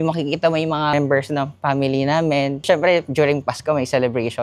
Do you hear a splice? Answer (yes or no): yes